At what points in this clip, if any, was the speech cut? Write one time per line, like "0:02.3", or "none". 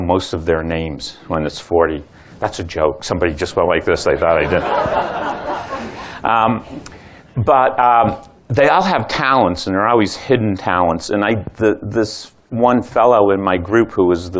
0:07.0